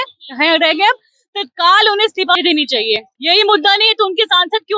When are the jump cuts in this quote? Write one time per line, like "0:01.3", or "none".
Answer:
0:03.1